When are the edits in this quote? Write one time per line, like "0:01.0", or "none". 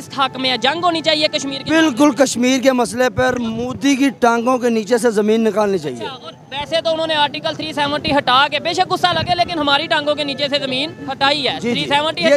none